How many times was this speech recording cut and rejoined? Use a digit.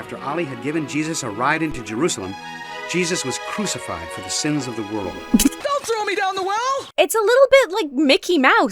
2